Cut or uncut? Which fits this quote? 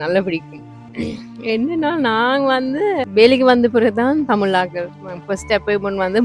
cut